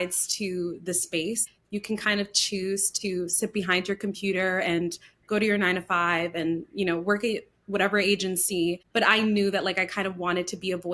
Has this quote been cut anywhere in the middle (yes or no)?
yes